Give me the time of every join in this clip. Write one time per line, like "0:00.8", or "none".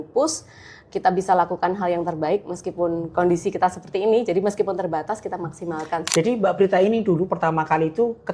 0:06.0